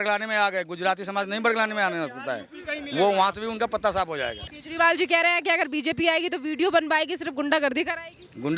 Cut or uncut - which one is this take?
cut